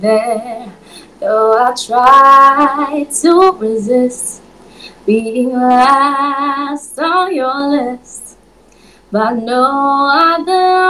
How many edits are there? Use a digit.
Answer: 0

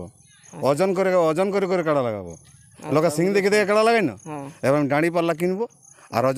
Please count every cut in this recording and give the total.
0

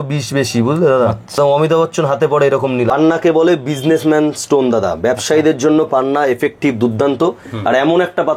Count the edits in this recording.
2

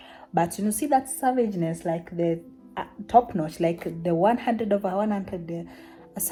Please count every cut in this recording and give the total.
0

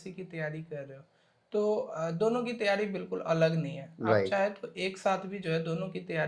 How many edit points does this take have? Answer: 0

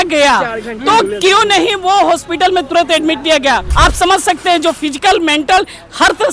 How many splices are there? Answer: 1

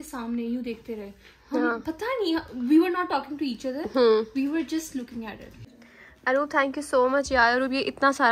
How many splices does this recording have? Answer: 1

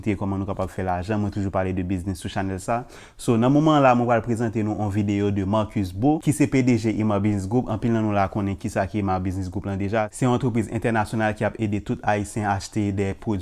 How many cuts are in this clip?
2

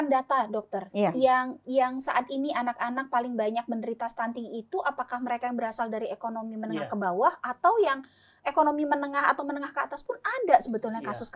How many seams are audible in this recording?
0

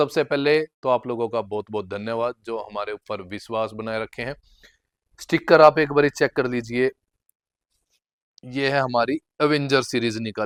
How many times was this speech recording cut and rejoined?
0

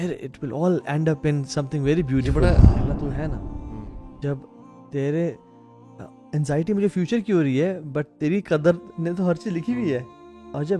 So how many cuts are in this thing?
1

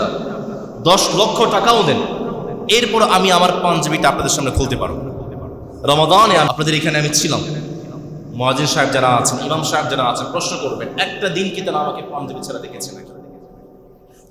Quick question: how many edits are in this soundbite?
1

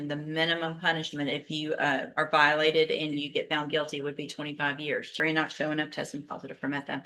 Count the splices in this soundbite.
1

